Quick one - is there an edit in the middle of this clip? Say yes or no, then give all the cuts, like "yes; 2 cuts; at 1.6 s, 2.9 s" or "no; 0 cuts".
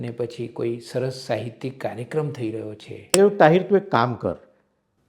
yes; 1 cut; at 3.1 s